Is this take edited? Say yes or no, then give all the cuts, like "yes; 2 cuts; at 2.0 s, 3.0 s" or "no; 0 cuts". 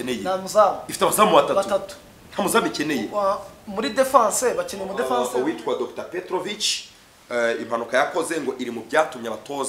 yes; 1 cut; at 5.2 s